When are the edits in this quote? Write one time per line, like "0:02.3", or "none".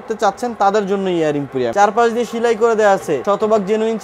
0:01.7
0:03.2